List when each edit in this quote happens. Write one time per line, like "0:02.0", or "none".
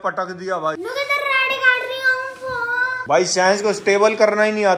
none